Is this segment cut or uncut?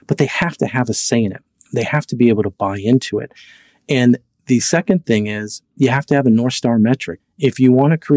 cut